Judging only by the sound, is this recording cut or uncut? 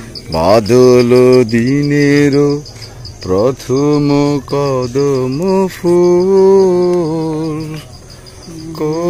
uncut